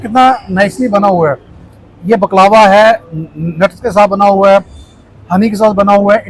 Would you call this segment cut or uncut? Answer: uncut